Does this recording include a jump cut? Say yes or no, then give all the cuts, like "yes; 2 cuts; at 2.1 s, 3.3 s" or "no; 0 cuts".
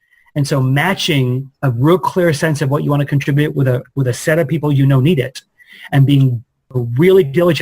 yes; 1 cut; at 6.7 s